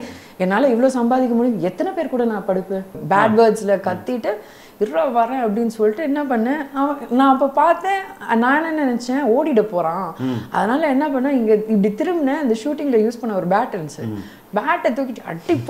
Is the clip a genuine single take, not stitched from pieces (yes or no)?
no